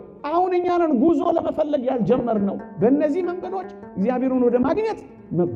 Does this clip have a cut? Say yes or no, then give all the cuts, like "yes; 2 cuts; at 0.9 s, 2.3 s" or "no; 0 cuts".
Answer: no; 0 cuts